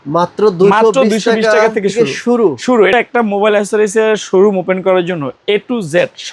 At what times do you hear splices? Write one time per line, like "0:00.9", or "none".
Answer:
0:02.9